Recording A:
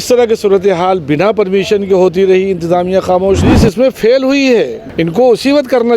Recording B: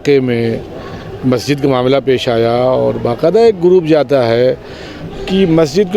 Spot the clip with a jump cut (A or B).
A